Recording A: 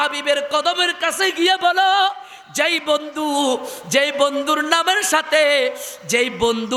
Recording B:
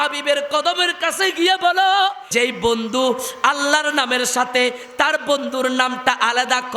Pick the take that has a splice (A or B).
B